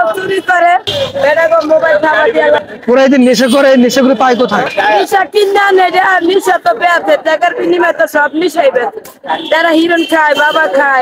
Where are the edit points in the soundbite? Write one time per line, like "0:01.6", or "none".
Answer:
0:00.9
0:02.6
0:04.7